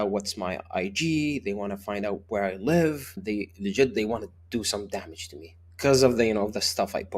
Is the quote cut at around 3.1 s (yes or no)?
yes